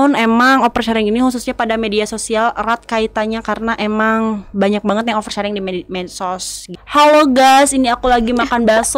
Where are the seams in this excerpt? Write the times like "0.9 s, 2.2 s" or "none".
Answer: 6.8 s